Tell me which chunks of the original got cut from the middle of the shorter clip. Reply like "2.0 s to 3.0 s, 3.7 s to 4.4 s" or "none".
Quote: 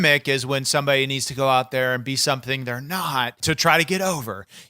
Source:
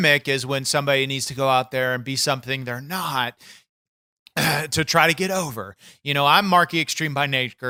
3.4 s to 4.7 s